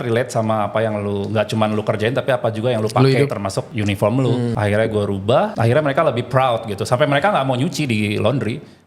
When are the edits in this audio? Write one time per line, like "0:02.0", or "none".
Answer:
0:03.3
0:04.5
0:05.5